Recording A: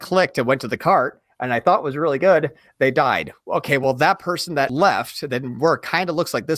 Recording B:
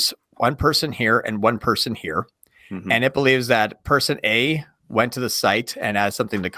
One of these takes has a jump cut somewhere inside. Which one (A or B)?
A